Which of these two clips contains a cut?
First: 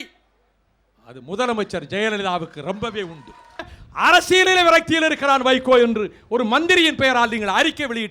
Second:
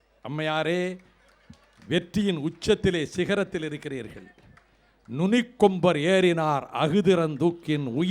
first; 1 cut; at 3.8 s

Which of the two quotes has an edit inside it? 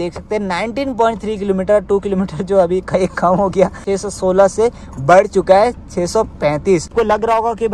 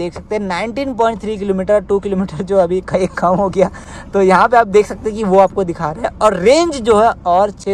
first; 2 cuts; at 3.8 s, 6.9 s

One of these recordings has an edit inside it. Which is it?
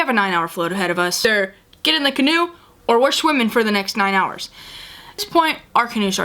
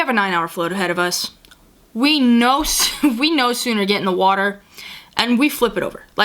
first; 2 cuts; at 1.2 s, 5.2 s

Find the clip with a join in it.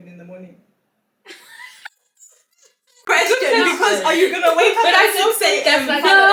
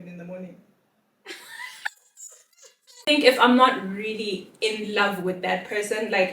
second; 1 cut; at 3.0 s

